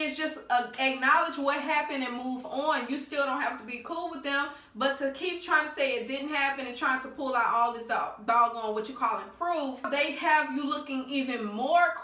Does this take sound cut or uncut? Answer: cut